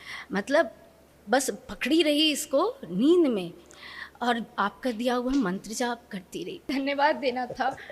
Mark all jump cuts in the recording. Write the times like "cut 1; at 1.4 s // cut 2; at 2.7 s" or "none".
cut 1; at 6.7 s